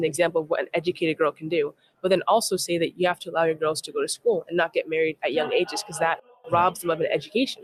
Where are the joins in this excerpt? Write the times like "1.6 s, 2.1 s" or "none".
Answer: none

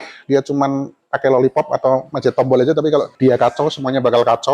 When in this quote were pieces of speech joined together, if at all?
3.1 s

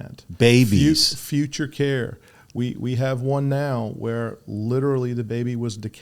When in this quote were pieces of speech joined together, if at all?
none

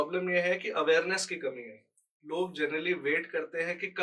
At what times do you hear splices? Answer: none

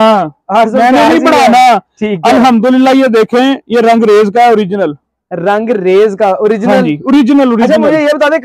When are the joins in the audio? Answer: none

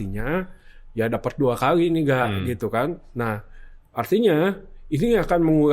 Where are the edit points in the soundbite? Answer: none

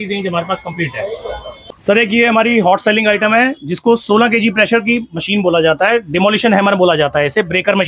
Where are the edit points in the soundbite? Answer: 1.6 s

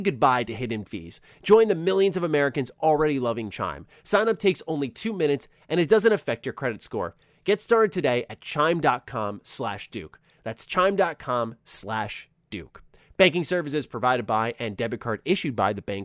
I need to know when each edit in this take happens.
none

